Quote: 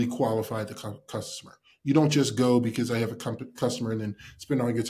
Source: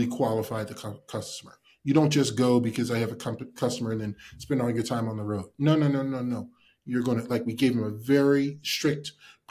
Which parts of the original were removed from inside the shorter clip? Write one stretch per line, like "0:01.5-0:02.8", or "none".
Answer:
none